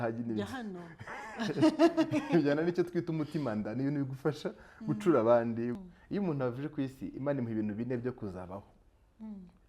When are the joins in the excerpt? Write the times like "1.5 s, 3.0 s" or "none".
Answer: 5.7 s

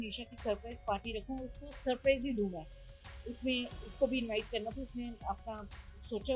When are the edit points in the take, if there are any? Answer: none

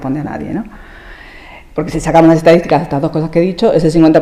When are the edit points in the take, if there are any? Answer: none

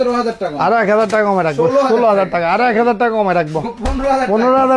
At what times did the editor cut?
none

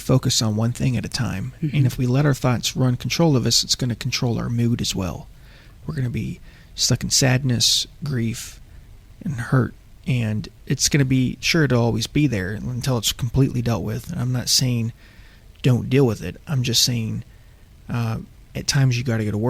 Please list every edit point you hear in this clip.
none

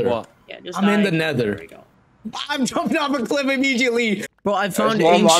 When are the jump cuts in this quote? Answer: 4.2 s

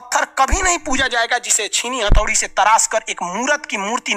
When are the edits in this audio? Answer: none

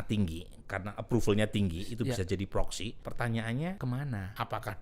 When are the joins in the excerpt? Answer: 3.0 s, 4.0 s

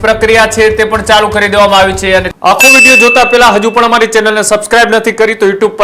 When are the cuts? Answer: 2.3 s

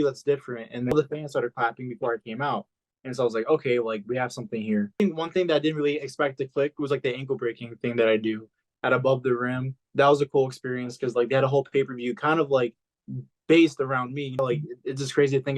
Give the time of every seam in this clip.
0.9 s, 5.0 s, 8.6 s, 14.4 s

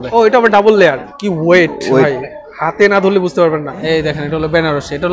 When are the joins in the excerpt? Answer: 1.1 s, 3.8 s

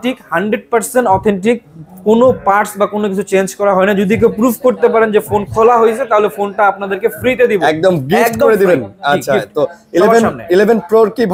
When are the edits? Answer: none

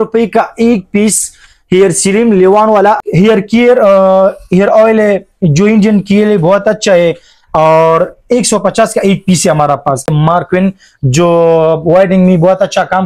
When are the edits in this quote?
3.0 s, 10.1 s

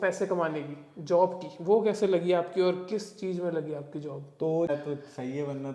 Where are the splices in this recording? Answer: 4.7 s

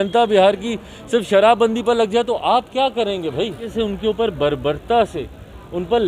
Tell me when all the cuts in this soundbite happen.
3.6 s

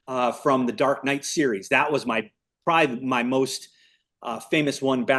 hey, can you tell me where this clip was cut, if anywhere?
none

